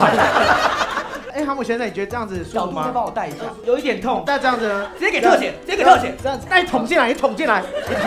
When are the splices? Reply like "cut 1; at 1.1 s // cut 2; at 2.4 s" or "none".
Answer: none